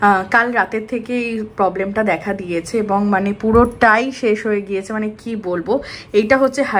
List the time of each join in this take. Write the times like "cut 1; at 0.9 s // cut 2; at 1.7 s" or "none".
none